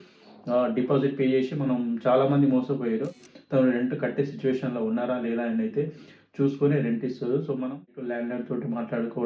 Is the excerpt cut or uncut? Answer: cut